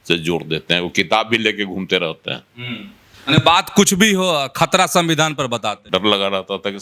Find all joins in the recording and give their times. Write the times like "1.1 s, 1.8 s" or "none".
5.8 s